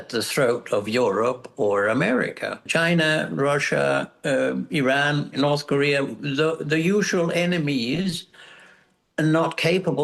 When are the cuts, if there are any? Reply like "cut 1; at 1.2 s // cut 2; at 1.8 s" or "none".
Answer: cut 1; at 2.7 s // cut 2; at 5.3 s